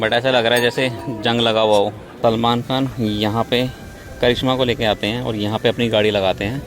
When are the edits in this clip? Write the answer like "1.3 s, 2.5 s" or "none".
2.0 s